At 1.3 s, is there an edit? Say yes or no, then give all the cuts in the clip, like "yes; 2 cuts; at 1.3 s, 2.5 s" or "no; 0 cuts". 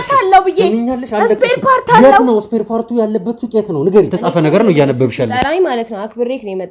no; 1 cut; at 4.1 s